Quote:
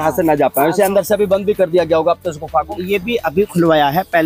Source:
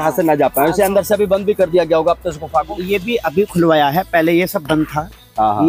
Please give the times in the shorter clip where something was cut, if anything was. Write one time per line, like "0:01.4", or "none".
none